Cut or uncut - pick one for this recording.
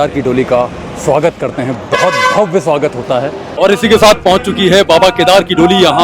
cut